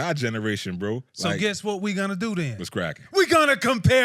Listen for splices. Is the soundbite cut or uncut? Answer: cut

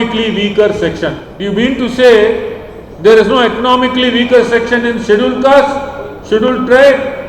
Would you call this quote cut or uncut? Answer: cut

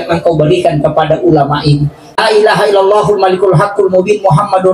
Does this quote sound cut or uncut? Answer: cut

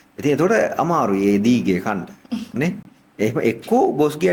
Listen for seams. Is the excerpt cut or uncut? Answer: uncut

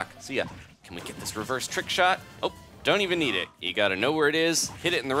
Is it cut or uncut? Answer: cut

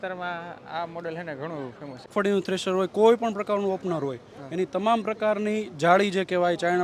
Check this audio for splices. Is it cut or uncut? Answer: cut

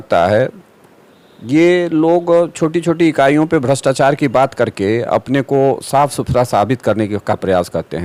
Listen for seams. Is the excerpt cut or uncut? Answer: uncut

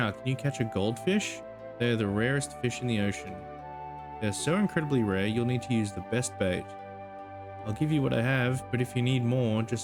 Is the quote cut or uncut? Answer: uncut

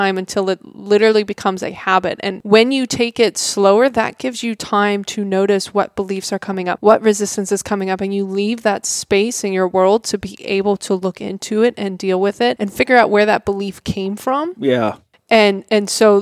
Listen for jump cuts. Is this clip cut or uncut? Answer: cut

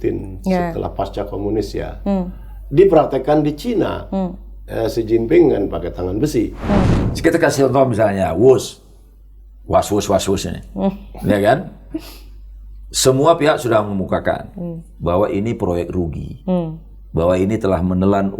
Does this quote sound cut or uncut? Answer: cut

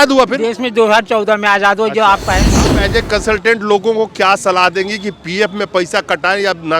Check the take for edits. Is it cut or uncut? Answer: cut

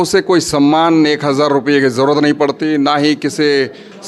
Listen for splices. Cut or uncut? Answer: uncut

